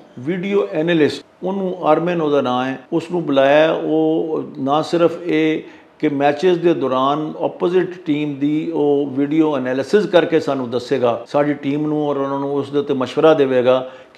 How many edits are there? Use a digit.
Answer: 3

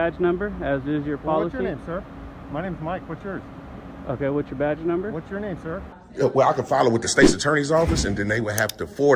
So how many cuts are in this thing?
1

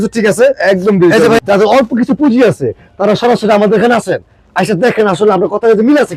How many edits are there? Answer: 1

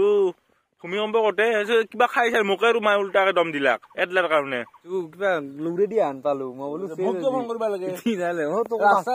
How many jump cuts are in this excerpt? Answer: 1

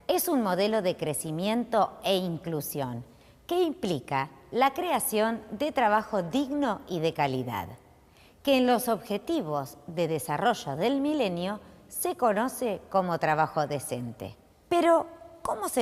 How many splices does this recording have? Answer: 1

